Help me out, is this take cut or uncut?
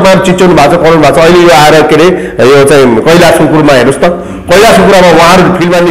uncut